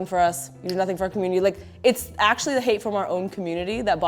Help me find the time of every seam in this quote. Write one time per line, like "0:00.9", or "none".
none